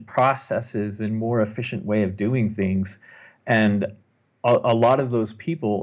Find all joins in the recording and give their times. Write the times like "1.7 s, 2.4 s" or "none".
none